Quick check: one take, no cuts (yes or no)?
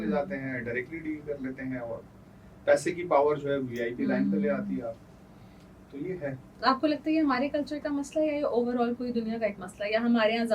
yes